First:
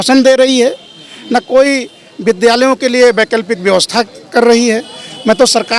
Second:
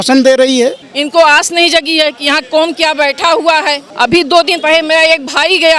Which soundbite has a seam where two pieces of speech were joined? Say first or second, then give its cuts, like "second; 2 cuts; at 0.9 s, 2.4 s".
second; 2 cuts; at 0.9 s, 3.9 s